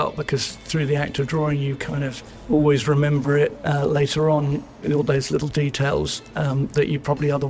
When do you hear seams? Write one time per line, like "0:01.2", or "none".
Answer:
0:02.3
0:03.6